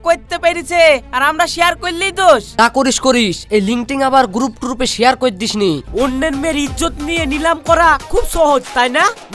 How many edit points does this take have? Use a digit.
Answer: 2